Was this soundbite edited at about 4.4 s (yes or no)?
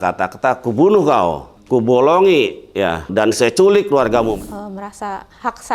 yes